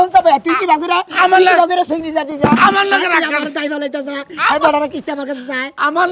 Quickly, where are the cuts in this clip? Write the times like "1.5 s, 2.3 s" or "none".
none